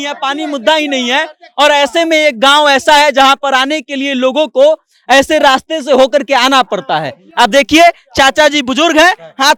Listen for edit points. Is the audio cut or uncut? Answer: uncut